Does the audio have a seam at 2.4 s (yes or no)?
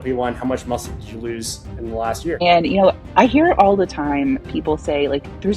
yes